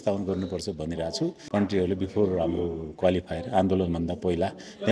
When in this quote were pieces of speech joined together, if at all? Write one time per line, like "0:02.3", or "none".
0:01.4